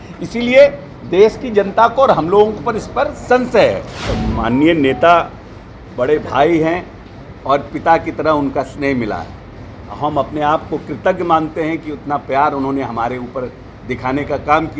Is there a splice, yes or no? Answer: yes